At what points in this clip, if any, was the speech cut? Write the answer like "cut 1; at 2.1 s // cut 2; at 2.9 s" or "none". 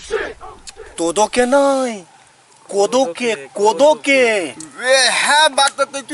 cut 1; at 1.0 s

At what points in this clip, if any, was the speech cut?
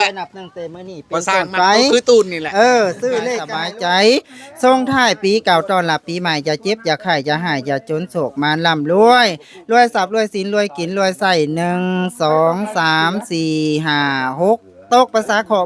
cut 1; at 3.4 s

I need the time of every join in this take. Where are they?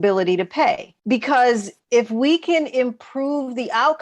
cut 1; at 0.9 s // cut 2; at 1.7 s

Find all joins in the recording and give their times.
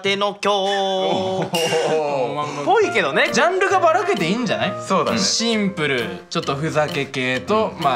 cut 1; at 3.3 s // cut 2; at 5.2 s

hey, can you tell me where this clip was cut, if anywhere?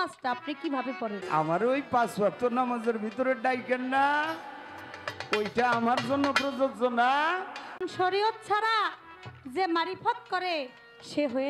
cut 1; at 1.2 s // cut 2; at 7.8 s

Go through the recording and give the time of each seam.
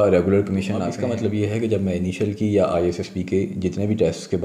cut 1; at 0.9 s

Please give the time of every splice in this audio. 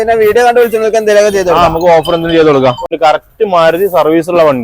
cut 1; at 2.9 s

